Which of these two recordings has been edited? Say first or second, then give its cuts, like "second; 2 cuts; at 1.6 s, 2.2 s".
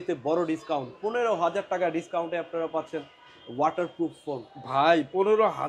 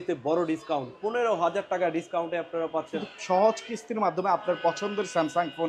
second; 1 cut; at 3.1 s